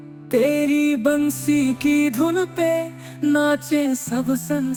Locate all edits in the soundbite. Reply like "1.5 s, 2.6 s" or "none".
none